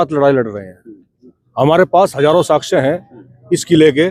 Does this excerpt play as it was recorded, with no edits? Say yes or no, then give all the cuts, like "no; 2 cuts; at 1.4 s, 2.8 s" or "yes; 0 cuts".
yes; 0 cuts